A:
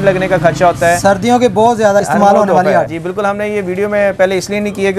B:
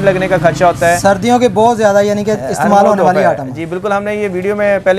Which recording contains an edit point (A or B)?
A